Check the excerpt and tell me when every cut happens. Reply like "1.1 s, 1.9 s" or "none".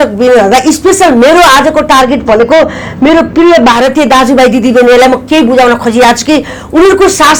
none